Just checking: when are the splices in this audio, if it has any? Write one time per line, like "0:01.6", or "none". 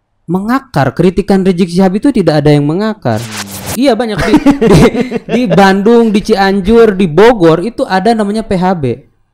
0:03.6